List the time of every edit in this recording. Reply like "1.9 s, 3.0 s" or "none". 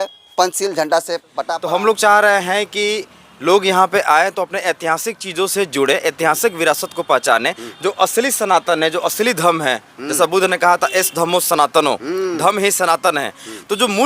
1.3 s